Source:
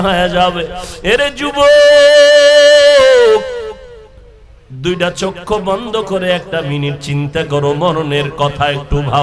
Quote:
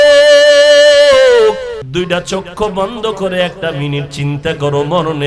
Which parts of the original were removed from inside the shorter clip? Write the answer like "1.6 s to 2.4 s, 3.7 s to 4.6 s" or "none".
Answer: 3.7 s to 4.7 s